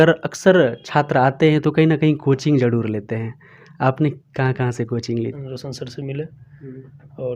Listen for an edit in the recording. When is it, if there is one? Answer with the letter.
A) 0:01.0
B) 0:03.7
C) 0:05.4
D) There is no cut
C